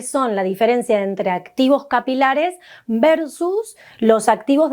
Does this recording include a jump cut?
no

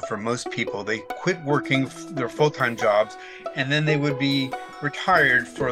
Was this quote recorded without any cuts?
yes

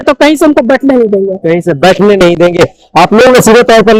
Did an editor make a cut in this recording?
no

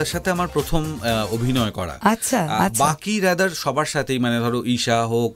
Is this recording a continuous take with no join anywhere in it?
yes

